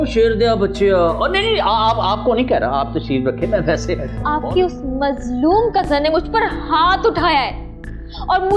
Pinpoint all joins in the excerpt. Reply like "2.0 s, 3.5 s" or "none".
4.1 s